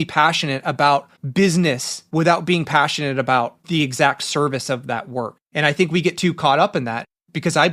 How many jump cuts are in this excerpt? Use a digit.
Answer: 3